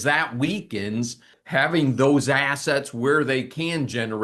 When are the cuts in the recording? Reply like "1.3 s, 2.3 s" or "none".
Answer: 1.3 s